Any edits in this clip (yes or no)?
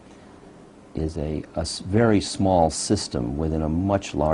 no